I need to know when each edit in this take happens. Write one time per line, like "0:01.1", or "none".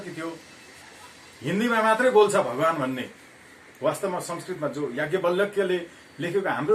none